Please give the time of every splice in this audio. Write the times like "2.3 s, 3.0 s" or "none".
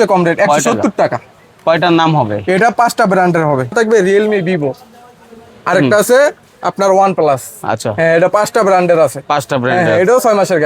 3.7 s